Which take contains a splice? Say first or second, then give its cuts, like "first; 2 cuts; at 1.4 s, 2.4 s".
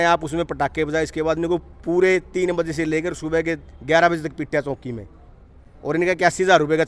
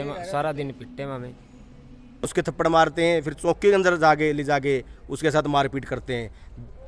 second; 1 cut; at 2.3 s